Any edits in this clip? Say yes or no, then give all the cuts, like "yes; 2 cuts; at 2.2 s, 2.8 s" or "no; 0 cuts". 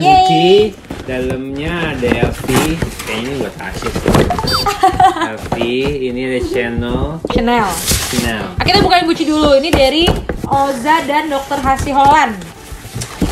no; 0 cuts